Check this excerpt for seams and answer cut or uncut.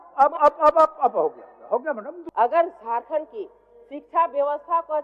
cut